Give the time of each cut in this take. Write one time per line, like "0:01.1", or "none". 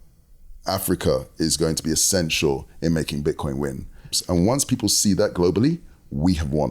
0:04.0

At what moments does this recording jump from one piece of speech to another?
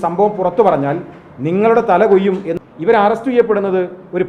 0:02.5

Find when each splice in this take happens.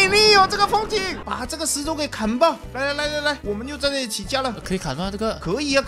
0:01.3

